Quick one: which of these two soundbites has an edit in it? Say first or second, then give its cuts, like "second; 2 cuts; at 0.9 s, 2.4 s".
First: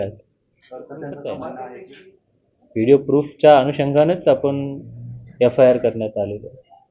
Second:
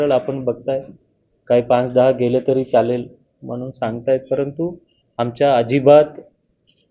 first; 1 cut; at 1.9 s